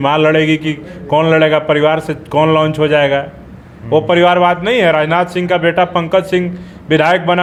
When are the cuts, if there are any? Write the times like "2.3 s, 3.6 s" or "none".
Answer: none